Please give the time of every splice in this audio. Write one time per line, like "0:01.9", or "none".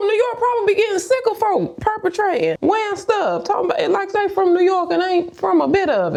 none